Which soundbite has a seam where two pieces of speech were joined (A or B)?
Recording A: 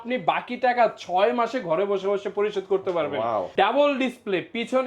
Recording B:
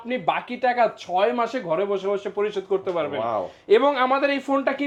A